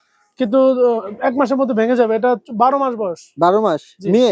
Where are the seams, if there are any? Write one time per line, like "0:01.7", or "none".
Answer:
none